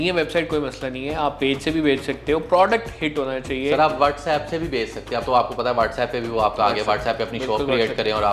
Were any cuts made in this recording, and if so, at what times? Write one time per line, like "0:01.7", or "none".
none